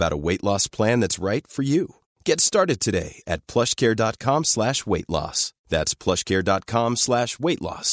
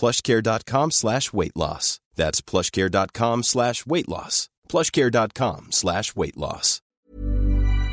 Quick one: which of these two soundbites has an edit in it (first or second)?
second